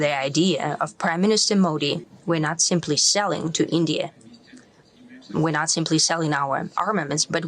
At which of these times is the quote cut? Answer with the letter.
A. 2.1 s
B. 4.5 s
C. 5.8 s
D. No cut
A